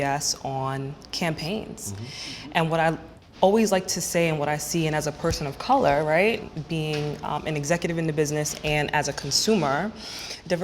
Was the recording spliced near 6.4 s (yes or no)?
yes